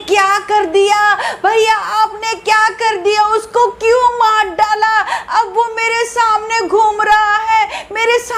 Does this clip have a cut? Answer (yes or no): no